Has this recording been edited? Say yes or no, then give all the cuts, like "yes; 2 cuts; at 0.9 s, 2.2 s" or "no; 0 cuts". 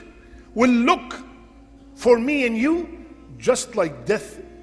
no; 0 cuts